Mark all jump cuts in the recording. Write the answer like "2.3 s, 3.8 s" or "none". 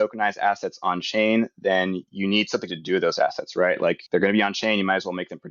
4.0 s